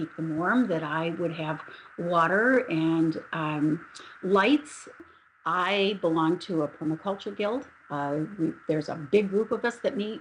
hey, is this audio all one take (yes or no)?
no